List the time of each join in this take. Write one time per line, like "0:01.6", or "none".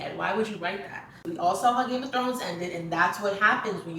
0:01.2